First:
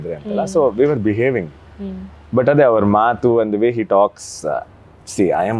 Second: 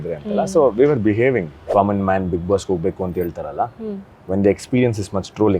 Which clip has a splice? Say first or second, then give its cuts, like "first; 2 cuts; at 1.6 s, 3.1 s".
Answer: second; 1 cut; at 1.6 s